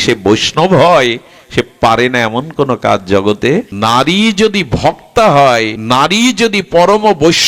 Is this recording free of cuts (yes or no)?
no